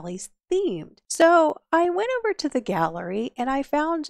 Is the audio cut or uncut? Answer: cut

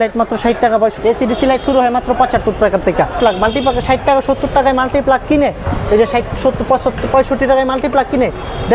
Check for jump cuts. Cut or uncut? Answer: cut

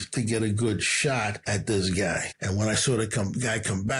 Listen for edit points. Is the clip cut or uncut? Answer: cut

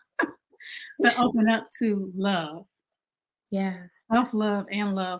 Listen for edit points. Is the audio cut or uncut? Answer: uncut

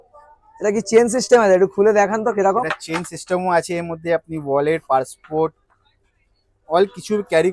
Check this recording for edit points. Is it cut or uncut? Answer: uncut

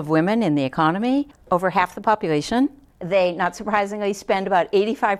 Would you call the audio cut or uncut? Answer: uncut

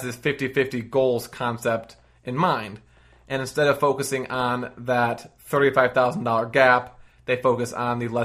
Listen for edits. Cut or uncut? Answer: uncut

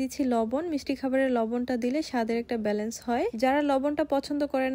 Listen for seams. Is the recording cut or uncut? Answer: uncut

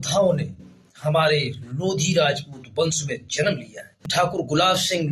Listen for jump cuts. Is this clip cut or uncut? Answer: cut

